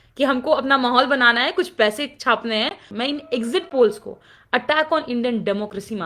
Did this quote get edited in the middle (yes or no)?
yes